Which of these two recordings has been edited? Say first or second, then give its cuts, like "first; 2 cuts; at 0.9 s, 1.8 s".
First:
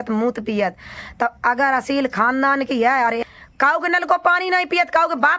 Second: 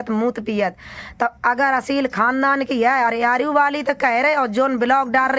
first; 1 cut; at 3.2 s